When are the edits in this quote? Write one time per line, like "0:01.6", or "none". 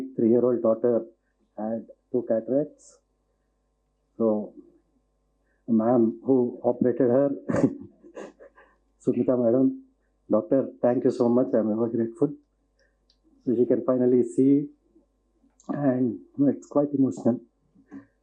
none